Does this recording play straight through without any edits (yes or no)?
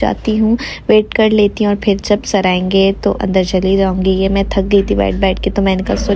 yes